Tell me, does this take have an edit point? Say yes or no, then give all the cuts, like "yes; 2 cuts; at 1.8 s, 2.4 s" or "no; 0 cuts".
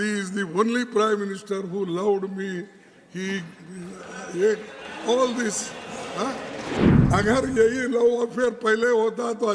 yes; 1 cut; at 6.9 s